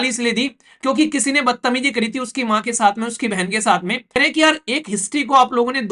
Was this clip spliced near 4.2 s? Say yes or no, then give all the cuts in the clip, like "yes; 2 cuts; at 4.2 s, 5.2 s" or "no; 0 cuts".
yes; 1 cut; at 4.2 s